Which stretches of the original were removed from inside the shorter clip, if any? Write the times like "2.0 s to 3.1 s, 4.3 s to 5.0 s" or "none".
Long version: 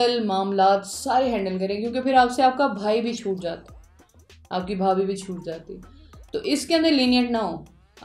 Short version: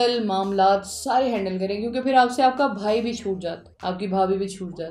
3.7 s to 4.4 s

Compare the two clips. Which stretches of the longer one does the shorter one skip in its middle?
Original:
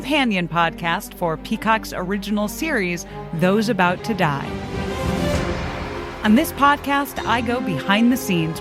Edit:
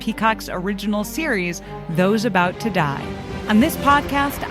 4.8 s to 6.1 s

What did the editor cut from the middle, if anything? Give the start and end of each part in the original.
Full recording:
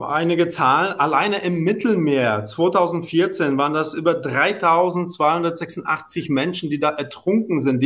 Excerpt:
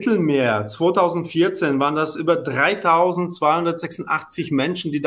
none

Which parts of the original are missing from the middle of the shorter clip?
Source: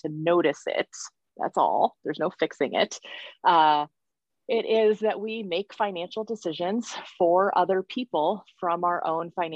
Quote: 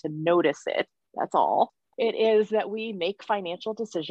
1.0 s to 1.2 s, 2.0 s to 4.3 s

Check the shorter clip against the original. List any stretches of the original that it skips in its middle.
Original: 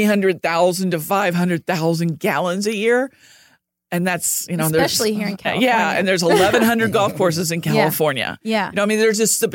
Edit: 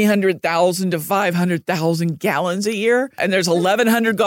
3.2 s to 5.9 s

